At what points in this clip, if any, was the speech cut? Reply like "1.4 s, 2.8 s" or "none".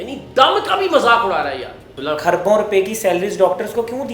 1.9 s